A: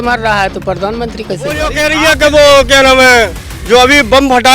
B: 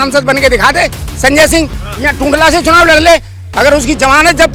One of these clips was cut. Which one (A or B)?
A